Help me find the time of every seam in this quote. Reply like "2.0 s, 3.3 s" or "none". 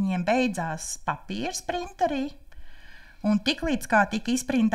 none